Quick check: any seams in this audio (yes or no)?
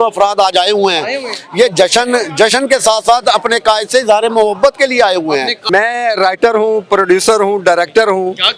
yes